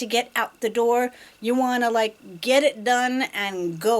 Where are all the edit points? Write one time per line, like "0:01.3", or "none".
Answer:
none